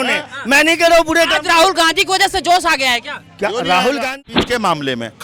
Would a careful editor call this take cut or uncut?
cut